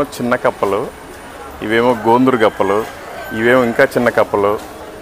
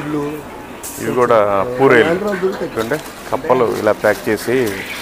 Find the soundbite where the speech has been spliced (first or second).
second